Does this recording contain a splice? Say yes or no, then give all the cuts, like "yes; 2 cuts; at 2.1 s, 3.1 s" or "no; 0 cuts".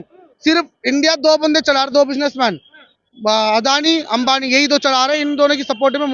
no; 0 cuts